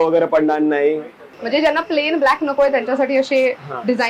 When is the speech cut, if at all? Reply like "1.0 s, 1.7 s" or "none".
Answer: 1.3 s